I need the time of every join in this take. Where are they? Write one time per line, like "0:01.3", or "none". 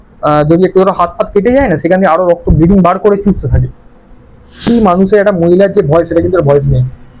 0:04.7

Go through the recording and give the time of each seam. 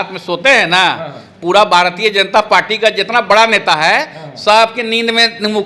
none

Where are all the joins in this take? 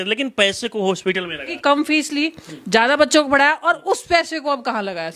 0:01.5

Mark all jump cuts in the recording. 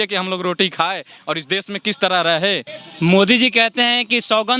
0:02.7

